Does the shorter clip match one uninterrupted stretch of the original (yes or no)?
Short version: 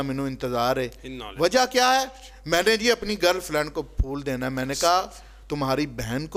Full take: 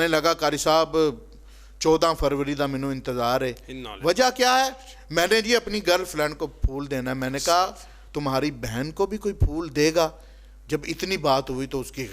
yes